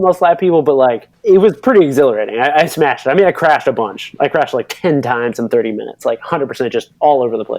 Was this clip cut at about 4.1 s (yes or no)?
no